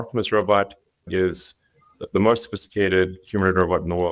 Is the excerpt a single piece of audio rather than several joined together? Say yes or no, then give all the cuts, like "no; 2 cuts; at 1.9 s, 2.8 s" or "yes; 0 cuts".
yes; 0 cuts